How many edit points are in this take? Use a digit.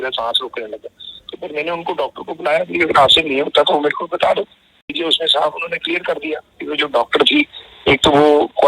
1